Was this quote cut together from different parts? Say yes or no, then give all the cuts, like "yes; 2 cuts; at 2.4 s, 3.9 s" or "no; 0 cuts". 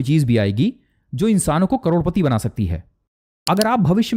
yes; 1 cut; at 3.0 s